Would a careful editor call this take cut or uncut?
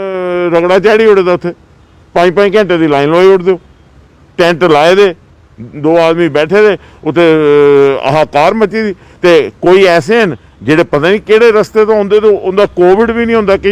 uncut